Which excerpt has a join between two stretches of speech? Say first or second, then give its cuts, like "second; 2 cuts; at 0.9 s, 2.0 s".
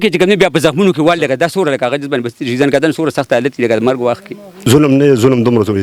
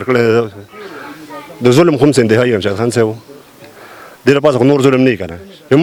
first; 1 cut; at 4.7 s